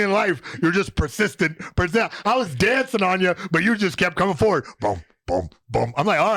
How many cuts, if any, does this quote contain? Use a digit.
0